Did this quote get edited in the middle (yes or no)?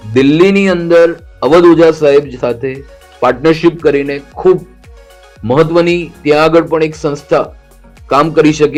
no